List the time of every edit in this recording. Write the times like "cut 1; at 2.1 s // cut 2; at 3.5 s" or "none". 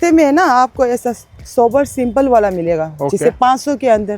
none